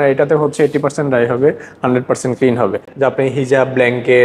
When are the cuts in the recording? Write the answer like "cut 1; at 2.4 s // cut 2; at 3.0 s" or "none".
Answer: cut 1; at 2.8 s